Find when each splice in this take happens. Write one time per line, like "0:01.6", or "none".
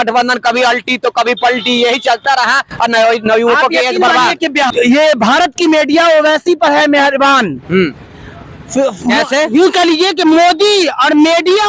0:04.7